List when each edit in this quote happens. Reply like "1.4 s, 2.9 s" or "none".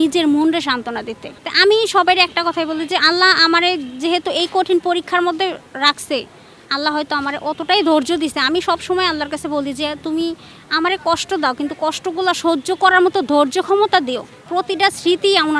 none